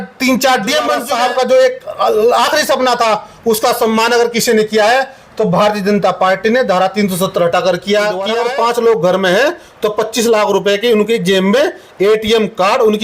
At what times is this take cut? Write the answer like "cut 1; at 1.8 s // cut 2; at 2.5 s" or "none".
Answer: cut 1; at 1.0 s // cut 2; at 8.4 s